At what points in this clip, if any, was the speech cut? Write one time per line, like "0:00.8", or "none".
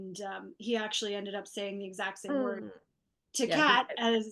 none